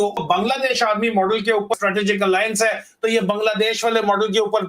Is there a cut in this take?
yes; 1 cut; at 1.7 s

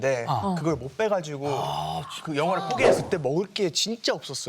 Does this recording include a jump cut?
yes; 1 cut; at 3.0 s

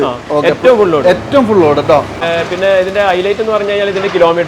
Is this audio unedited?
no; 1 cut; at 2.3 s

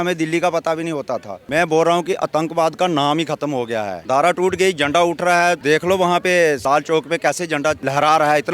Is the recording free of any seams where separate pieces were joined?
no; 5 cuts; at 1.3 s, 4.0 s, 5.6 s, 6.6 s, 7.8 s

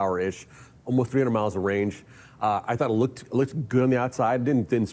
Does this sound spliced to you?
no; 0 cuts

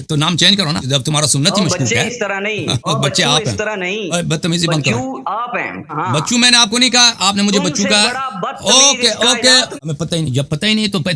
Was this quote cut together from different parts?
yes; 3 cuts; at 4.1 s, 5.9 s, 9.7 s

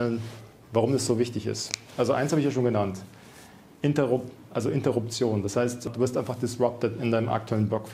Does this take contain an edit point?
yes; 1 cut; at 5.9 s

